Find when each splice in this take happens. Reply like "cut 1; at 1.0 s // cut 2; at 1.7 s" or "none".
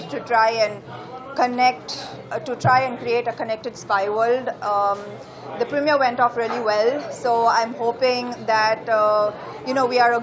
none